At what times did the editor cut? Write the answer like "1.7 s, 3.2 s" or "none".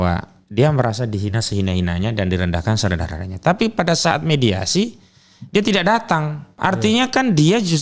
6.5 s